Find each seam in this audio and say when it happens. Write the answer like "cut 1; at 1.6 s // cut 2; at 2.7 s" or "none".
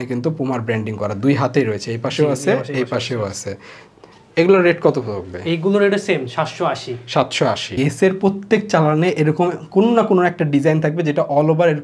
cut 1; at 7.7 s